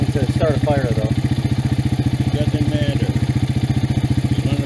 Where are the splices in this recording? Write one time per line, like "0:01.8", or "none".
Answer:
none